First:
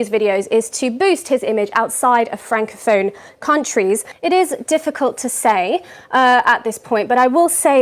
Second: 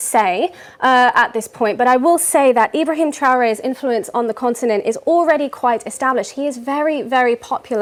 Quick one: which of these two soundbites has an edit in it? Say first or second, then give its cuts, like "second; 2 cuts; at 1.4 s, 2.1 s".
first; 1 cut; at 4.1 s